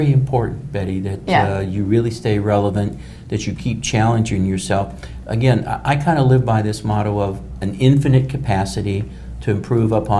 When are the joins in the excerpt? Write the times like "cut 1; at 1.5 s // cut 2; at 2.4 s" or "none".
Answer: none